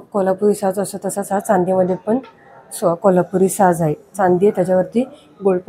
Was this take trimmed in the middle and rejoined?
no; 0 cuts

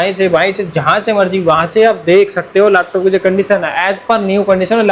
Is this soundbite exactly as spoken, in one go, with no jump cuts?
yes; 0 cuts

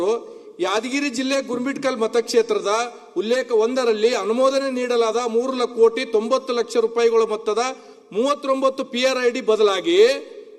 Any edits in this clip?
no; 0 cuts

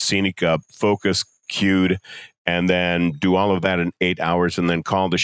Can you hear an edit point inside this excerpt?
no; 0 cuts

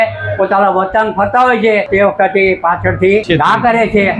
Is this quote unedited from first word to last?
no; 2 cuts; at 1.9 s, 3.2 s

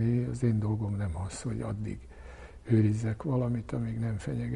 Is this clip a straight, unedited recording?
yes; 0 cuts

